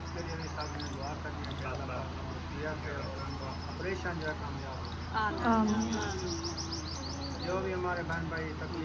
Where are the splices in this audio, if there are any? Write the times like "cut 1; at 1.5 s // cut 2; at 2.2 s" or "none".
none